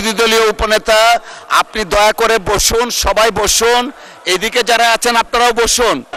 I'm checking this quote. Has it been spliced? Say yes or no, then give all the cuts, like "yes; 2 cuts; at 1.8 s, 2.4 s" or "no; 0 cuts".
no; 0 cuts